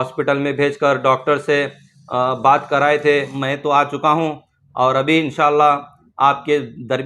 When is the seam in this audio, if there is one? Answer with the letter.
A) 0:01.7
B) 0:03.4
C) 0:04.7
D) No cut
B